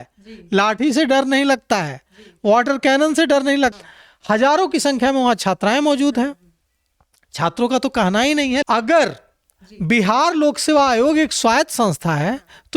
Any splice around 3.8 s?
yes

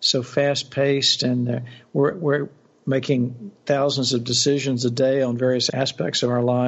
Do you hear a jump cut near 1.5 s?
no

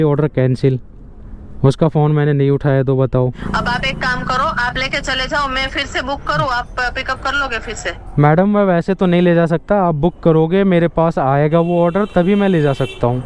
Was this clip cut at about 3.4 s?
yes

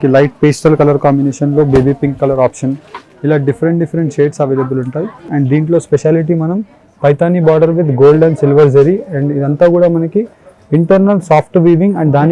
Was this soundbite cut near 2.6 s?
no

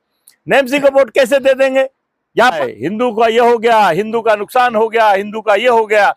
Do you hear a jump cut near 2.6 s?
yes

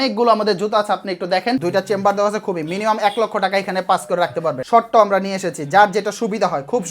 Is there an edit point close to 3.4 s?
no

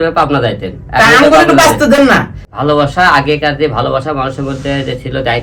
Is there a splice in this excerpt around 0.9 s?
no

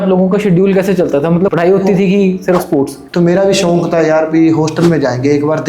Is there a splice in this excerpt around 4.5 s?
no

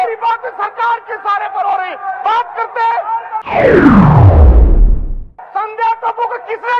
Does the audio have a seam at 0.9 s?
no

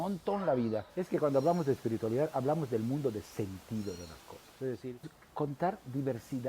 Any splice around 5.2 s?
yes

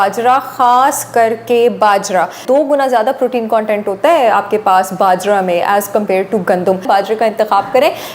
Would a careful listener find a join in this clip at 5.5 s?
no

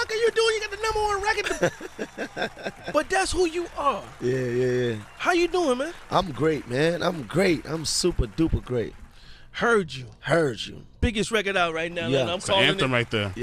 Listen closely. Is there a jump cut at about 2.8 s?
no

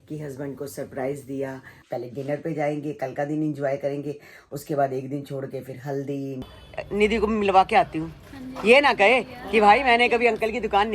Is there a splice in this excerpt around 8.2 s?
no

